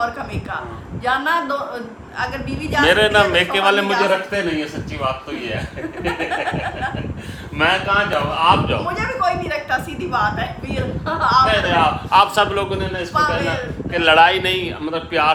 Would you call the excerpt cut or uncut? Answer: uncut